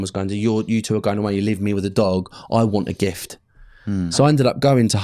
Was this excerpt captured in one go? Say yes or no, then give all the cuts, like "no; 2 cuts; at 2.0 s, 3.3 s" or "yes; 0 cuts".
no; 1 cut; at 4.1 s